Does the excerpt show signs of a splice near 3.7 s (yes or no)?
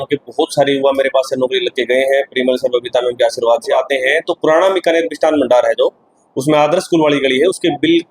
yes